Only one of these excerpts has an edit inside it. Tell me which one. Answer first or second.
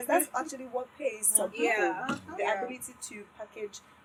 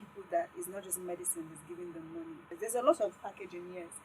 second